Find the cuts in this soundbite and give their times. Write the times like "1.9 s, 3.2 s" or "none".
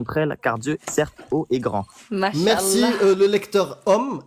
none